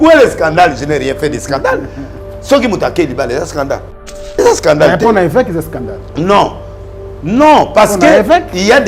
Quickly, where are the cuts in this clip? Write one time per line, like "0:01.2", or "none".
0:04.0